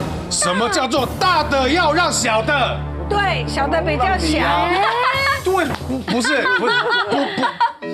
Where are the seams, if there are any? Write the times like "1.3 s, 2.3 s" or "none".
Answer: none